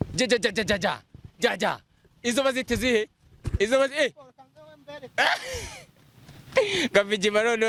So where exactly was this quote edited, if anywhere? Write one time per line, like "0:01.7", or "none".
none